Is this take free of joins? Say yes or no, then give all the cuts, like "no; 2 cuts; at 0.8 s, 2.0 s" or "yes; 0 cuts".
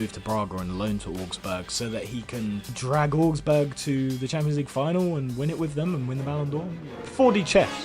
no; 1 cut; at 7.0 s